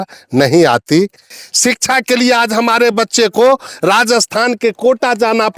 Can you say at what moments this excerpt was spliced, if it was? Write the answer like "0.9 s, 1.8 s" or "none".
1.3 s

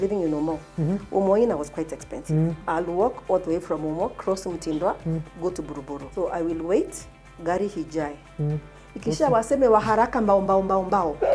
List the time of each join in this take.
2.6 s, 6.0 s

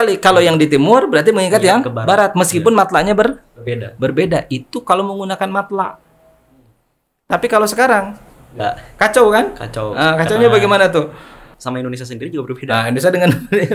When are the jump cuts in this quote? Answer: 11.5 s

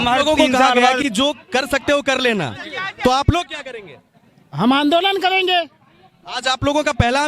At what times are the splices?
1.0 s

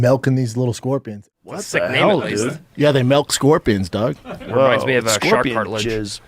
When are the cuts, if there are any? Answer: 1.2 s

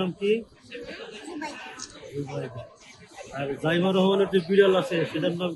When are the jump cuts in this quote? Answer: none

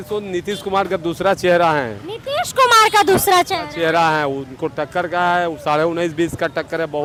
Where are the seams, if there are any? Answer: none

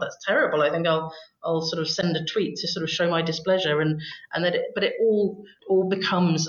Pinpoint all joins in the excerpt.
none

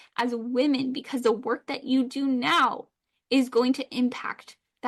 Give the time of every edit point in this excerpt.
none

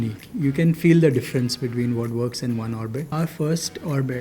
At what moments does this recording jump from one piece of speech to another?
3.1 s

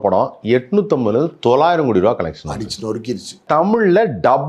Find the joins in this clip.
3.4 s

